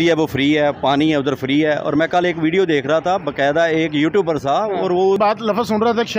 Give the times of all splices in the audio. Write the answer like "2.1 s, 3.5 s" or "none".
5.2 s